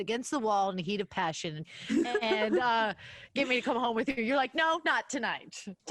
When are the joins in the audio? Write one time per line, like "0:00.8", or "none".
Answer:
0:01.7